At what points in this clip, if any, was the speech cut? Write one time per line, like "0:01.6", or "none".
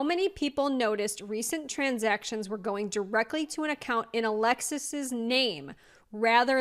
none

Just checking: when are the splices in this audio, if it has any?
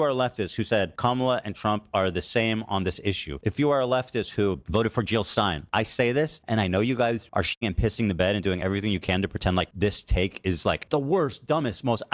0:00.9
0:03.3
0:04.6
0:05.6
0:06.4
0:07.5
0:09.7
0:10.8

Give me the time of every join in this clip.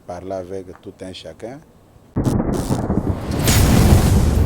0:02.1

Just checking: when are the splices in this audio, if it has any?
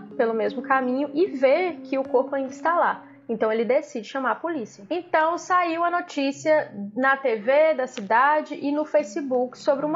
0:04.8

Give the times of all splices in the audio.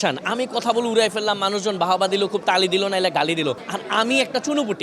0:03.7

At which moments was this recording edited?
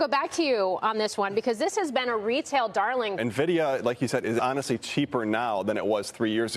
0:03.2
0:04.4

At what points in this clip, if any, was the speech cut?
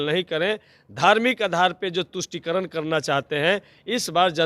none

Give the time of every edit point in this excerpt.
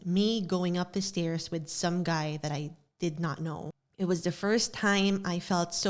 0:03.8

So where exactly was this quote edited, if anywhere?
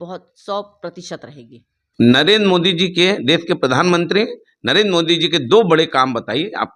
none

